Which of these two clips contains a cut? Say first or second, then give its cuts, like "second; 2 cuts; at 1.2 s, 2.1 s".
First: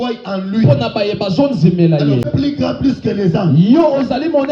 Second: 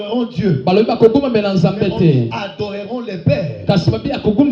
first; 1 cut; at 2.3 s